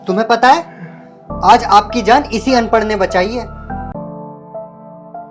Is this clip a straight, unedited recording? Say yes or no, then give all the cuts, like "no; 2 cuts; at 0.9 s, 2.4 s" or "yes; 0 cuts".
no; 1 cut; at 3.9 s